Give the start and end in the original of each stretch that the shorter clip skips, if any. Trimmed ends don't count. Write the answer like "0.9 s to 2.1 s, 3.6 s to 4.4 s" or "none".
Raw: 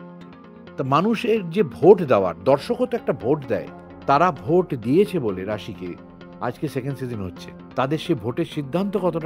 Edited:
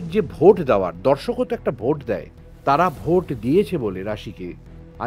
none